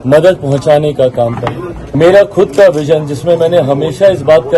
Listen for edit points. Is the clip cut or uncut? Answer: cut